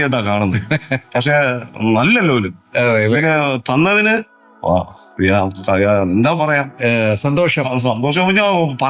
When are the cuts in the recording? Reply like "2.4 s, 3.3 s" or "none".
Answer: none